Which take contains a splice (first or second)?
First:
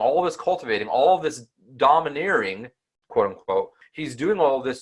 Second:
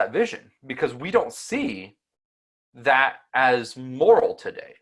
first